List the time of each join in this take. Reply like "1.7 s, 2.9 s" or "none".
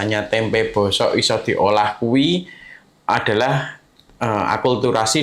none